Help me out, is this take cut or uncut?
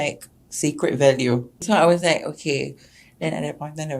cut